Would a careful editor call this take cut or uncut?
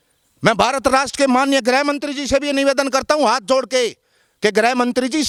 uncut